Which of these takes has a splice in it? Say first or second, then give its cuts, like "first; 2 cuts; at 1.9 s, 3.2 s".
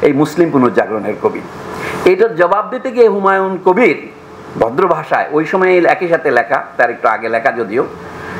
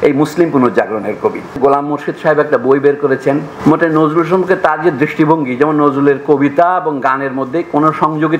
second; 2 cuts; at 1.5 s, 3.5 s